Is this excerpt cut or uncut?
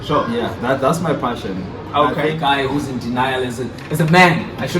cut